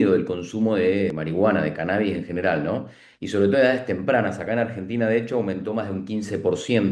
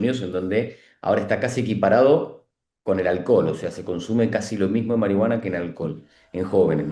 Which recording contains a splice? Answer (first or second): first